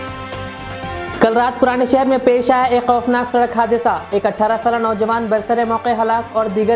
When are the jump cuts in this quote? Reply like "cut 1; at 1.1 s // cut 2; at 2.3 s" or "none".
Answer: cut 1; at 1.0 s